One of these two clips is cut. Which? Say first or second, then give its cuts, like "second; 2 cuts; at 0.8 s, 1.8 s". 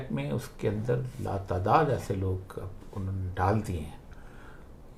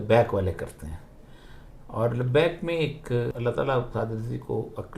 second; 1 cut; at 3.3 s